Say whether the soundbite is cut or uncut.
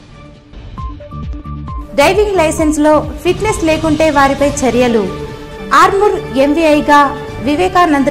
uncut